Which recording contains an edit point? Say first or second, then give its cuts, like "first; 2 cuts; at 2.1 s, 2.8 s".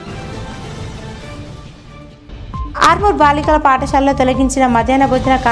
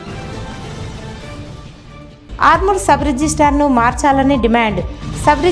first; 1 cut; at 2.2 s